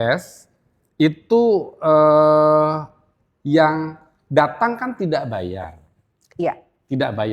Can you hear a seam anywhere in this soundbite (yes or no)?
no